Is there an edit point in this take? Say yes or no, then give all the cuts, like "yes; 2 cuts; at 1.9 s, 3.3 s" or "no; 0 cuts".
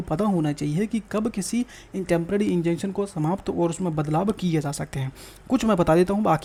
no; 0 cuts